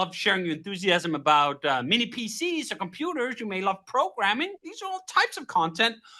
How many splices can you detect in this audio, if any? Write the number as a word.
one